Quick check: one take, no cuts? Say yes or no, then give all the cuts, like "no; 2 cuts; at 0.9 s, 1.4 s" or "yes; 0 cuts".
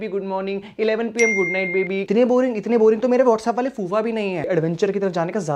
no; 2 cuts; at 2.0 s, 4.4 s